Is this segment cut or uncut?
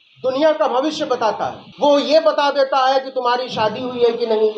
cut